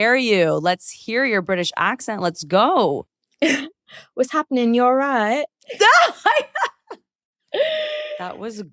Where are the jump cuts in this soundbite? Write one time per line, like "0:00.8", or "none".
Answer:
0:03.2